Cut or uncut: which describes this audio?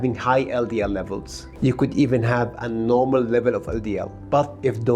cut